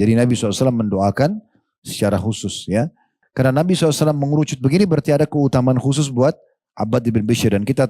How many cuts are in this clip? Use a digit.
1